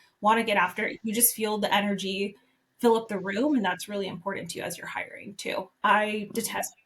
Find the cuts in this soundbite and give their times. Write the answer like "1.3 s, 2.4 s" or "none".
5.7 s